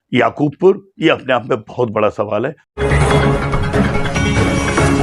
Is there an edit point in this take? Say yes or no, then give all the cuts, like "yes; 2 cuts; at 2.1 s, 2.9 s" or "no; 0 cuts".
yes; 1 cut; at 2.6 s